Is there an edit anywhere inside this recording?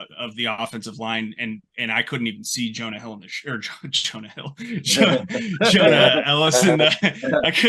no; 0 cuts

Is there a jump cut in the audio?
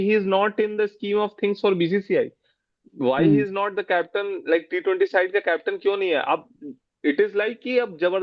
no; 0 cuts

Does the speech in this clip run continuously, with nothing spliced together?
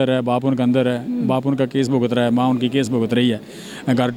yes; 0 cuts

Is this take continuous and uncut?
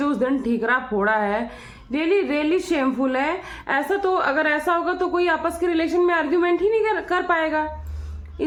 yes; 0 cuts

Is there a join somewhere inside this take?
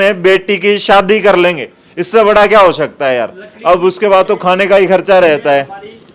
no; 0 cuts

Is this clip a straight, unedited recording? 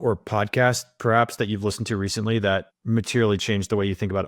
yes; 0 cuts

